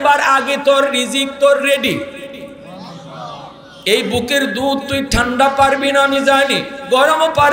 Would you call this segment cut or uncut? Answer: cut